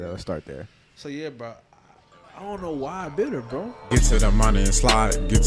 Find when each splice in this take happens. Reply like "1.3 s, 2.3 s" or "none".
3.8 s